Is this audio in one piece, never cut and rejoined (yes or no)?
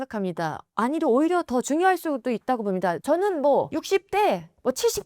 no